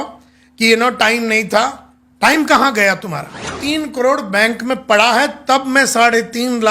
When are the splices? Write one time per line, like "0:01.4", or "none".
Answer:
0:03.6